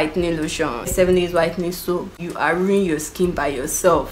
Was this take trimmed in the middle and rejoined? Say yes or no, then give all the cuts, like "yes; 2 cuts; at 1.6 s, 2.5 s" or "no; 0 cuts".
yes; 1 cut; at 0.9 s